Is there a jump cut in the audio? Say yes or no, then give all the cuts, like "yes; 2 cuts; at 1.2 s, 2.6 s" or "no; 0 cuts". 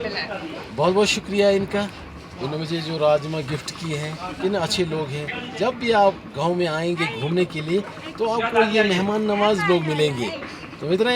no; 0 cuts